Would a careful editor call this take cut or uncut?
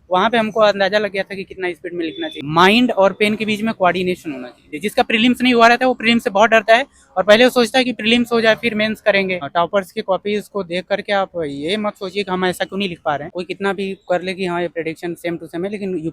cut